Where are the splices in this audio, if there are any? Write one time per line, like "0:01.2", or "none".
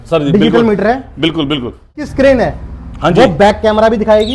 0:02.1